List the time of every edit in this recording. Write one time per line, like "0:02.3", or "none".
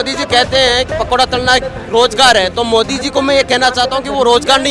0:00.9